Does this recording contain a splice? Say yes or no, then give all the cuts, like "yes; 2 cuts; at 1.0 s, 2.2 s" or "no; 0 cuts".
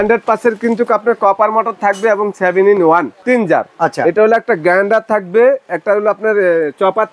yes; 1 cut; at 3.1 s